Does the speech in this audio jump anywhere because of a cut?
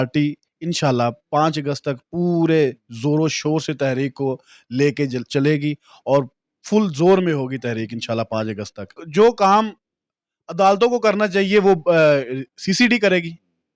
yes; 1 cut; at 9.0 s

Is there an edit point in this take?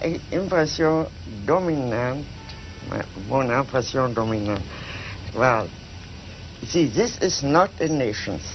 yes; 1 cut; at 1.9 s

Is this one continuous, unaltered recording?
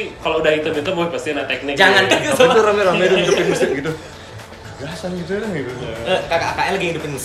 no; 1 cut; at 2.1 s

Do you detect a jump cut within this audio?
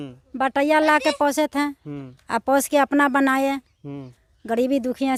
no; 0 cuts

